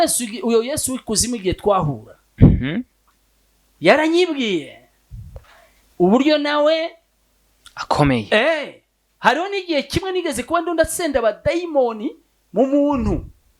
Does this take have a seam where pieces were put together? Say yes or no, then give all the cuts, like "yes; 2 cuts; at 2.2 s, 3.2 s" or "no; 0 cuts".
no; 0 cuts